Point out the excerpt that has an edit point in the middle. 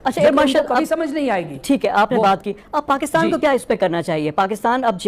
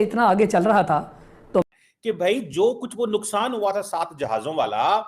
second; 1 cut; at 1.7 s

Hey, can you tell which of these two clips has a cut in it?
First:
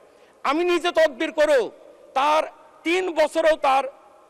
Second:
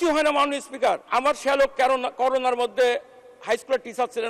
second; 1 cut; at 1.1 s

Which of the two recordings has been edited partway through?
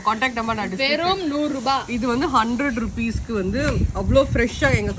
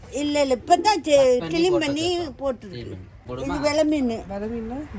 second; 1 cut; at 3.2 s

